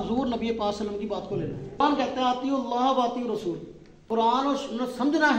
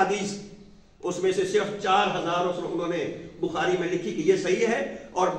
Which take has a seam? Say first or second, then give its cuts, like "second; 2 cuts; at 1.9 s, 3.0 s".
first; 2 cuts; at 1.8 s, 4.0 s